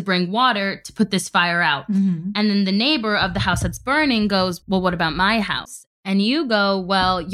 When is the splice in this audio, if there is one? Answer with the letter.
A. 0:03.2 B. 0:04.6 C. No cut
B